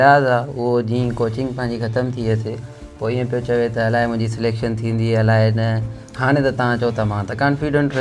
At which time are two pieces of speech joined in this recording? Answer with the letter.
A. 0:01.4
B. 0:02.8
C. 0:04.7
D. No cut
D